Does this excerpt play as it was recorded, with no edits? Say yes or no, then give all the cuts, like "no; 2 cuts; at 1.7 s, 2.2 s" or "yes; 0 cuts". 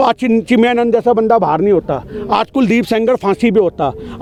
yes; 0 cuts